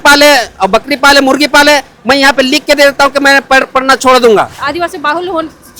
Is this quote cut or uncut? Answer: cut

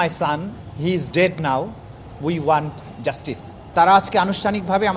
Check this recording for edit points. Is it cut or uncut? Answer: cut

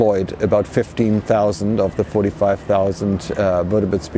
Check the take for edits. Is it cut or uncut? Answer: uncut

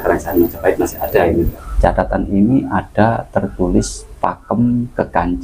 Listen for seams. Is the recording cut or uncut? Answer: cut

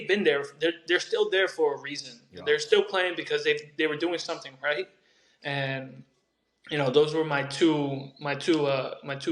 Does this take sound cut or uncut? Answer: uncut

